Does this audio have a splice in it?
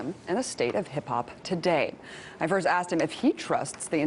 no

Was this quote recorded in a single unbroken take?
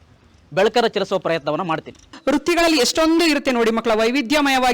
no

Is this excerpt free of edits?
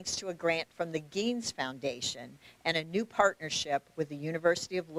yes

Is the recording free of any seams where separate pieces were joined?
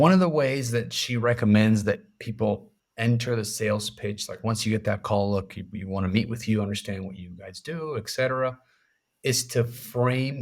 yes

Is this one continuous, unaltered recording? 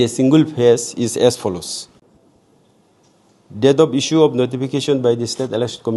no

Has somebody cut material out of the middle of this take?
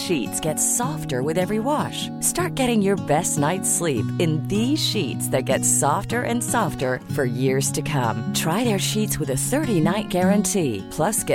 no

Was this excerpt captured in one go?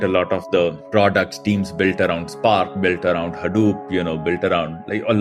yes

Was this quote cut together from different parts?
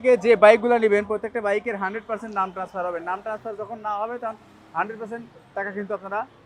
no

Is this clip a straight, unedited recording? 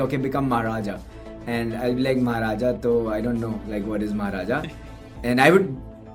yes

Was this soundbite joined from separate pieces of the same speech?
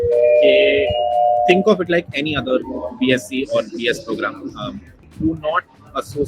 yes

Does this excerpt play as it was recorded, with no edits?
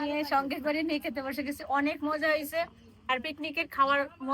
yes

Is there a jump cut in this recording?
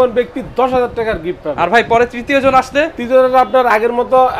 no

